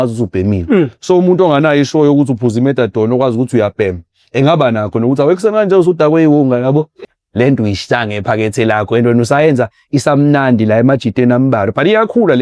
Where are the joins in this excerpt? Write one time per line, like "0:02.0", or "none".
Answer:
0:07.0